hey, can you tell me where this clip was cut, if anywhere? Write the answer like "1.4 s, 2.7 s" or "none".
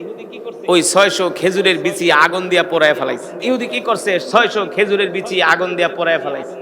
3.3 s